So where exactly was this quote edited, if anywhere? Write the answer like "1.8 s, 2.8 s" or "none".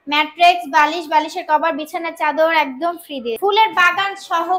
3.4 s